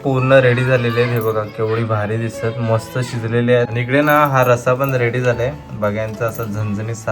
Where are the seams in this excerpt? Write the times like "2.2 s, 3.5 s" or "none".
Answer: 3.7 s